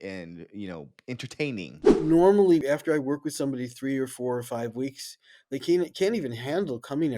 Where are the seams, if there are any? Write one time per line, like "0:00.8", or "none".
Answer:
0:01.8
0:02.6